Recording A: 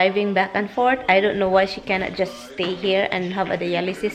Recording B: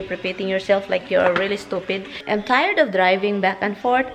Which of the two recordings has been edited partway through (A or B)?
B